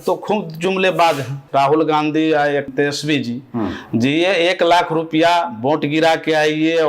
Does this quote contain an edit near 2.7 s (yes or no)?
yes